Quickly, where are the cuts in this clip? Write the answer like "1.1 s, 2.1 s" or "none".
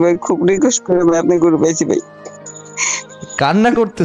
none

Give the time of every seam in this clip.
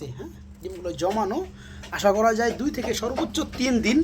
none

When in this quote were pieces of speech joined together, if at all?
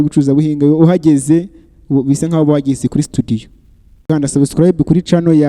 4.0 s

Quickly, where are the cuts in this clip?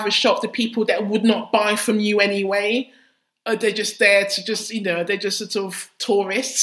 none

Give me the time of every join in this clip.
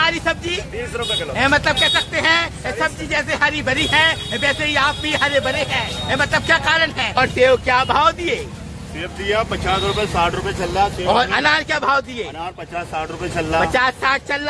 7.2 s

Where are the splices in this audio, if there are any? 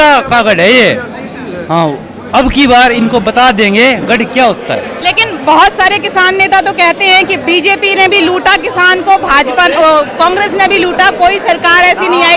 4.9 s

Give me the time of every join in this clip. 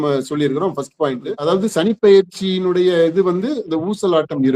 1.3 s

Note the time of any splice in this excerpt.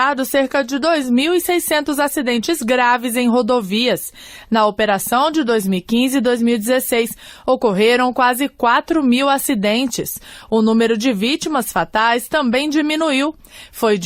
none

